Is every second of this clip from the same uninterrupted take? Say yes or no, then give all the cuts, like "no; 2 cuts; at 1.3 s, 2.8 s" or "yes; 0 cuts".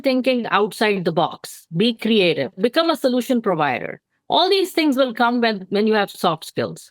no; 1 cut; at 2.6 s